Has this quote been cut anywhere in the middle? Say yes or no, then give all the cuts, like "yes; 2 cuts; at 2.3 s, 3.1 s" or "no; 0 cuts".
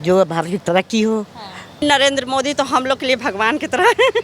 yes; 1 cut; at 1.8 s